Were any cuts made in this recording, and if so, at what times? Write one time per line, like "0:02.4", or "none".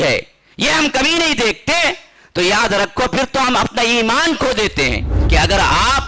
0:05.1